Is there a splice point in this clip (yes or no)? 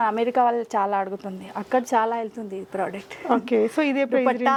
no